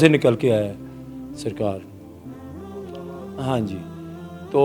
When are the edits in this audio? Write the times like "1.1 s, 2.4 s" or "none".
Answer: none